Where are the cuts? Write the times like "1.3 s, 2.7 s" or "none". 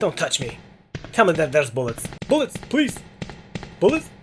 2.1 s